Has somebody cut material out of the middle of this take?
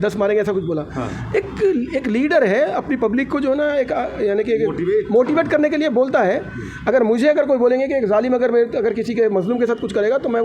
no; 0 cuts

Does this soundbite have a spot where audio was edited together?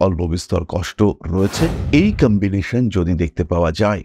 yes; 1 cut; at 1.8 s

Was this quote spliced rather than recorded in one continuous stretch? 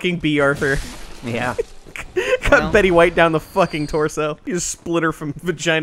yes; 1 cut; at 4.4 s

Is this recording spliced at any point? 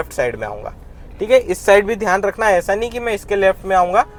no; 0 cuts

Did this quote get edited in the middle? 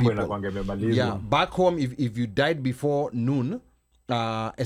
no; 0 cuts

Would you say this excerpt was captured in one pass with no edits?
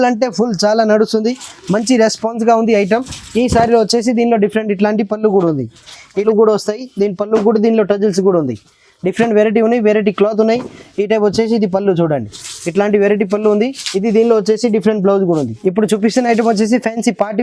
no; 2 cuts; at 6.1 s, 15.5 s

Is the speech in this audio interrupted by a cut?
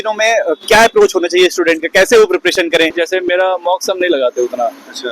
yes; 1 cut; at 3.0 s

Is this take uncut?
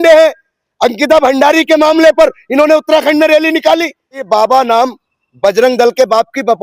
no; 1 cut; at 4.2 s

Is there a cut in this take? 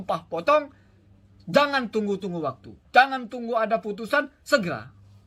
no; 0 cuts

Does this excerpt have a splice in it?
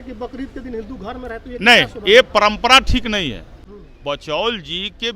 no; 0 cuts

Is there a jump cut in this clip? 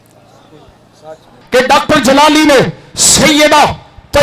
yes; 1 cut; at 1.3 s

